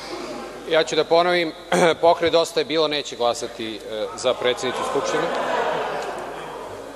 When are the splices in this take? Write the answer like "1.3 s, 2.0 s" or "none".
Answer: none